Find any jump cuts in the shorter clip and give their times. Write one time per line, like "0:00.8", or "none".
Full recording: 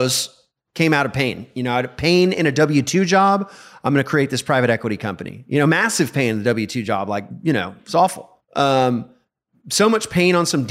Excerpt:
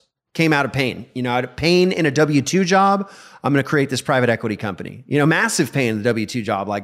none